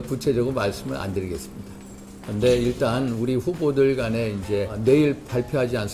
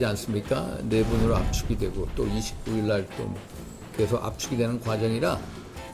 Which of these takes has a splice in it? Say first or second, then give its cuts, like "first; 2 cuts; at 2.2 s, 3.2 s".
first; 1 cut; at 4.7 s